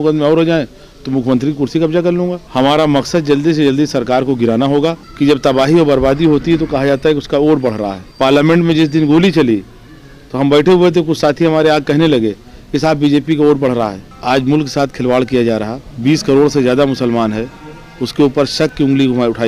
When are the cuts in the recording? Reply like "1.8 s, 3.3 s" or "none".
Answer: 2.4 s, 5.1 s, 8.0 s, 14.1 s, 15.8 s